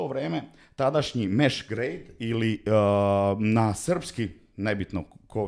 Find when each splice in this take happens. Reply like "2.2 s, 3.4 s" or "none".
none